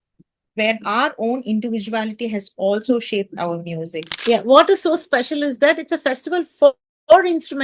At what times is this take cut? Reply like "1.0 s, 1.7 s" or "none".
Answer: 4.1 s